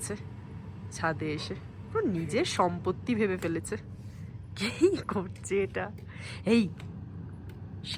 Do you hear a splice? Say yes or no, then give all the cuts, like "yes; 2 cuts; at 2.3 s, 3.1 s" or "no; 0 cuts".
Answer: no; 0 cuts